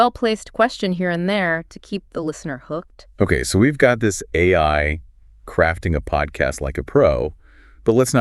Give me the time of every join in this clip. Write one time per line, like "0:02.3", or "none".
none